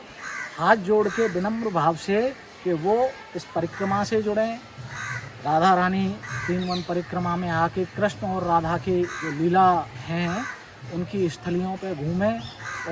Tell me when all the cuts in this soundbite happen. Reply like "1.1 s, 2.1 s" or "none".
none